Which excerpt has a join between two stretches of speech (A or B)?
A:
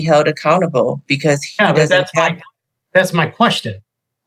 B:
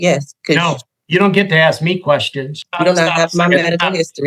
B